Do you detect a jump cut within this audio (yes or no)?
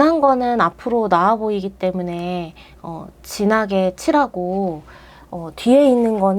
no